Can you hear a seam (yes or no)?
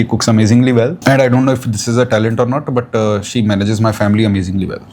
yes